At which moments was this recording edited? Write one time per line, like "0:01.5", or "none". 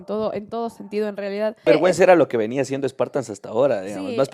0:01.6